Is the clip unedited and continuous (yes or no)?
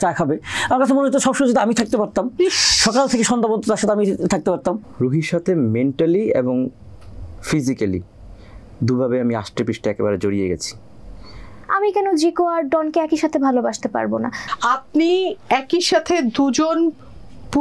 no